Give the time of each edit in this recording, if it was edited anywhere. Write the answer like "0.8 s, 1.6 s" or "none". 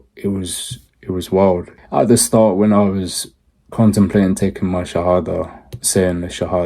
1.7 s